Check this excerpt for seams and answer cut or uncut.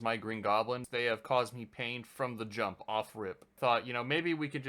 cut